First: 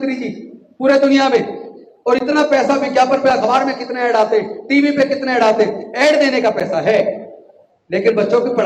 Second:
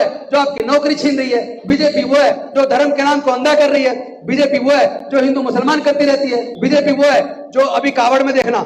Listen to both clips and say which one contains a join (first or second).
second